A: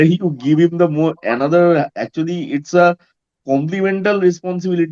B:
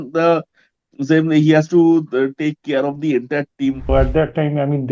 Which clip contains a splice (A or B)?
B